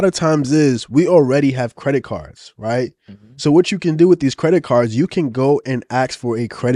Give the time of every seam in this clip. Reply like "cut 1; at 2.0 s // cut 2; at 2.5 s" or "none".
none